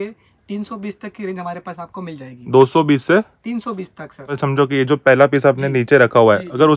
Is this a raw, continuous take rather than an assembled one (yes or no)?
no